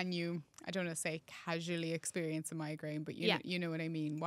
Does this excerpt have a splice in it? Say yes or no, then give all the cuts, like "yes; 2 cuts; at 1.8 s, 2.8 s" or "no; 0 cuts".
no; 0 cuts